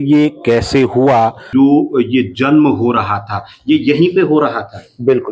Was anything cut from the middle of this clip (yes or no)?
yes